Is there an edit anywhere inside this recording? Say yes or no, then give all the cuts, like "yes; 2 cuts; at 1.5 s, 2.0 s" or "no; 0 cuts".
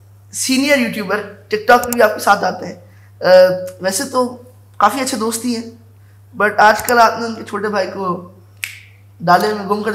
no; 0 cuts